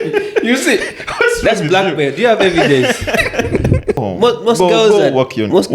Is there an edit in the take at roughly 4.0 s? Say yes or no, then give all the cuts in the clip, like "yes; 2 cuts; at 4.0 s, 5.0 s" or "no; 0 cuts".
yes; 1 cut; at 4.0 s